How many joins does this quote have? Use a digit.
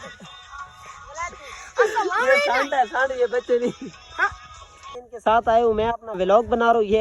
1